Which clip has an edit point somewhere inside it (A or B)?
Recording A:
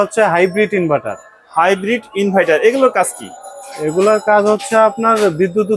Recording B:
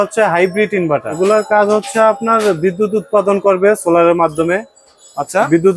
B